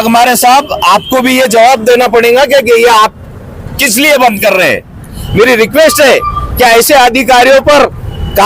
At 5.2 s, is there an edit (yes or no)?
yes